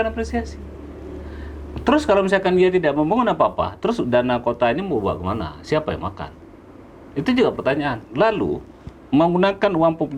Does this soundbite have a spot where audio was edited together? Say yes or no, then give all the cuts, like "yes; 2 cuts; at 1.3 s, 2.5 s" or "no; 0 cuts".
no; 0 cuts